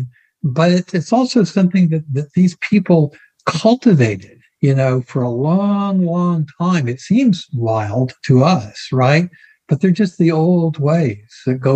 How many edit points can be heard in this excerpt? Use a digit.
0